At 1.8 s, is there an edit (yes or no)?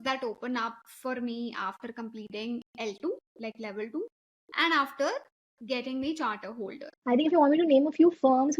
no